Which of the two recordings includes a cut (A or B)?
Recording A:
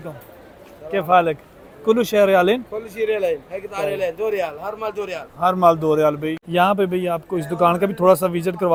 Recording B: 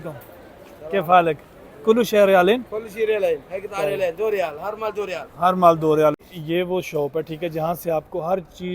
B